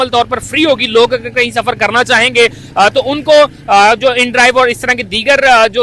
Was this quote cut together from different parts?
no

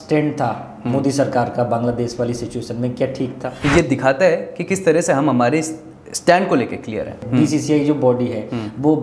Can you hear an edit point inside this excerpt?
yes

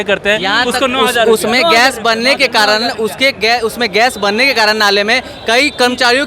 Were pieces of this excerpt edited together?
no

